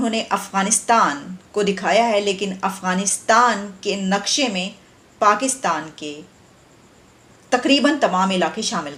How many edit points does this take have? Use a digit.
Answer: 0